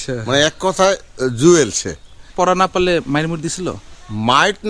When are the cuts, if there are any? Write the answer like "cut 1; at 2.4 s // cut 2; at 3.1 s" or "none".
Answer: cut 1; at 2.2 s